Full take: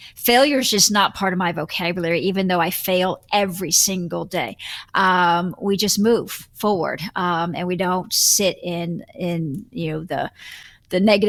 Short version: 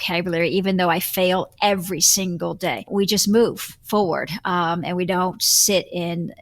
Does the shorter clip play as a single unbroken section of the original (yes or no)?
no